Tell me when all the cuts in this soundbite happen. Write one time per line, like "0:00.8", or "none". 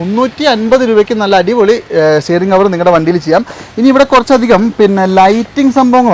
none